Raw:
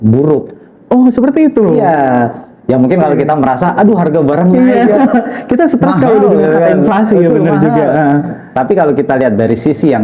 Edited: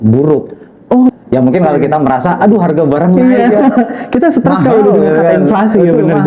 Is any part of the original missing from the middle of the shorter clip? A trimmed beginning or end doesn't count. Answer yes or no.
yes